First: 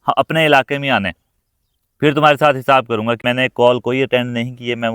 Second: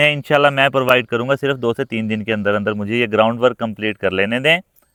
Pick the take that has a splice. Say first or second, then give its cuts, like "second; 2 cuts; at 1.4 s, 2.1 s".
first; 1 cut; at 3.2 s